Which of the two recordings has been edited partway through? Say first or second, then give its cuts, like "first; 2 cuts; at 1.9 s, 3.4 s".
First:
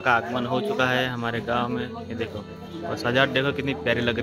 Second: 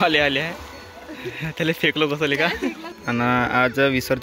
second; 1 cut; at 3.2 s